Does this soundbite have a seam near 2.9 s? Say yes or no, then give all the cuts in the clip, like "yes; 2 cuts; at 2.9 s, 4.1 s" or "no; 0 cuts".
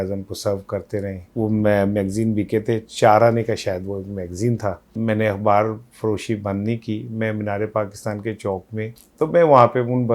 no; 3 cuts; at 1.3 s, 4.9 s, 9.0 s